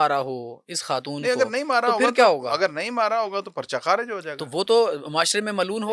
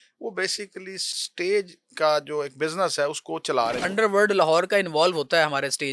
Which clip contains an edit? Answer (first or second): second